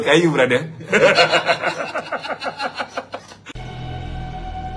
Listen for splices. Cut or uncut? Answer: cut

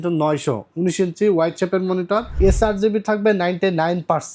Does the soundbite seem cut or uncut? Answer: cut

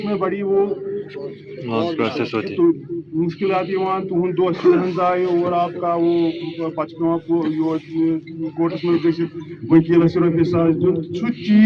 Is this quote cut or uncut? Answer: uncut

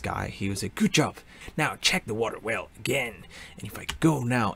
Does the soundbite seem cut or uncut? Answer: cut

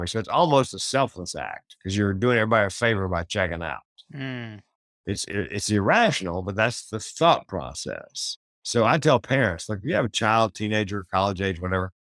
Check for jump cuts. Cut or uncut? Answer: uncut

